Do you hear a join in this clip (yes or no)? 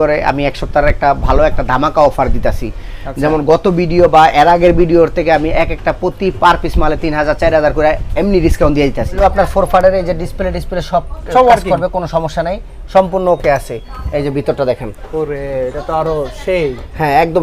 yes